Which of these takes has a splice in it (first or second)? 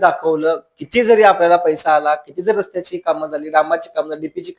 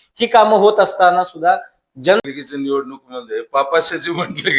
second